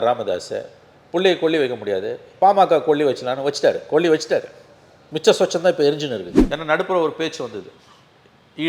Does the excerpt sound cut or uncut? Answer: cut